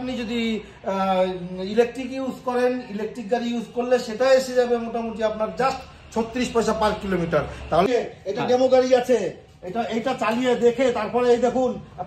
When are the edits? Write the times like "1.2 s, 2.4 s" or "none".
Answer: 7.9 s